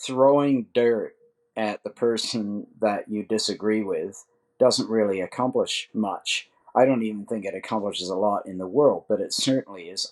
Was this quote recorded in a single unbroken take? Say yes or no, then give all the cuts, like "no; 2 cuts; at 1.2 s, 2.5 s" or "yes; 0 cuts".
yes; 0 cuts